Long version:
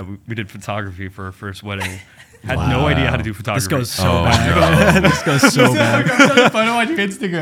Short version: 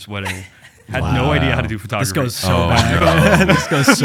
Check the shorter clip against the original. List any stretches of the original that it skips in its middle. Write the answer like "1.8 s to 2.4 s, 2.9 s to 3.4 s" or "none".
none